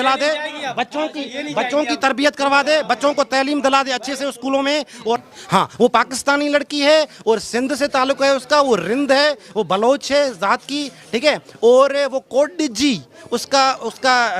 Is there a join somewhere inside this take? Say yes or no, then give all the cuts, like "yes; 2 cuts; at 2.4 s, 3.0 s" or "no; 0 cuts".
yes; 1 cut; at 5.3 s